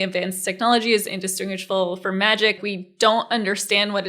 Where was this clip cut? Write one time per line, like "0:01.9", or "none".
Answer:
0:02.6